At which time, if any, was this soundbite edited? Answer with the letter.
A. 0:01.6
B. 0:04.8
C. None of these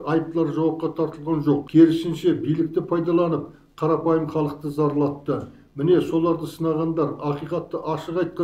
A